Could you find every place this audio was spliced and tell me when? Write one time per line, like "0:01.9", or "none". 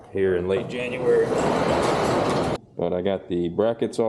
0:02.6